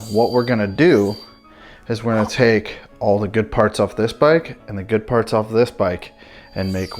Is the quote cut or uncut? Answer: uncut